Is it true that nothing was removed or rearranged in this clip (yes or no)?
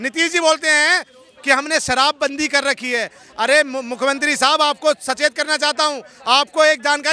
yes